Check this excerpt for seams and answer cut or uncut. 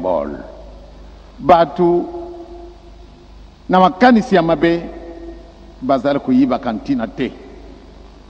uncut